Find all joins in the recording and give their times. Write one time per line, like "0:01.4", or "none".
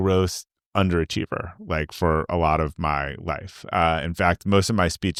none